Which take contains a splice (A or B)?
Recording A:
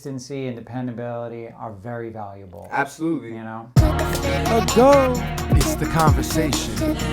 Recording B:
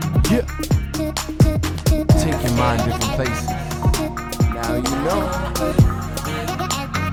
A